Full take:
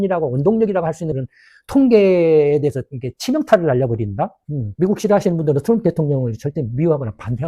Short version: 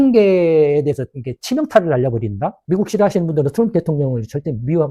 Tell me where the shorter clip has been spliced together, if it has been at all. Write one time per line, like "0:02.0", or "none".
0:02.6